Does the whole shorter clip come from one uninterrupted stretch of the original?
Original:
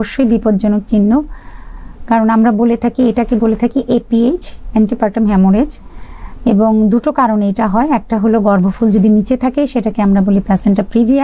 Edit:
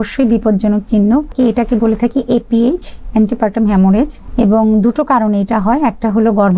no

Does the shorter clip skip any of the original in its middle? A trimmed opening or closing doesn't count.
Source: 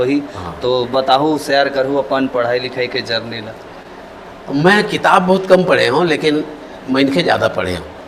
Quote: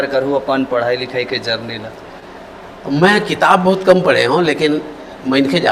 no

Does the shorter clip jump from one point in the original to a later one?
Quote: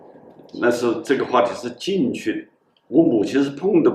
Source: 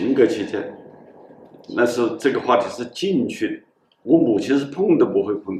no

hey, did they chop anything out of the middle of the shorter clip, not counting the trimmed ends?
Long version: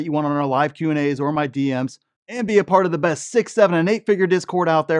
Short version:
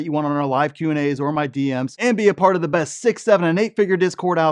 yes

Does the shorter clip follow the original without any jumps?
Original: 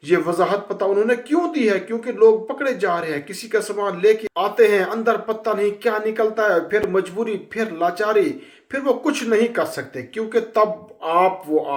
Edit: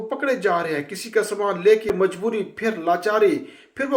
no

